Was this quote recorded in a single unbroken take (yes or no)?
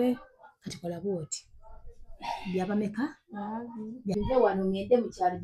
no